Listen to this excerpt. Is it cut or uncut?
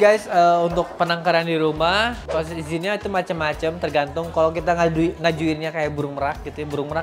uncut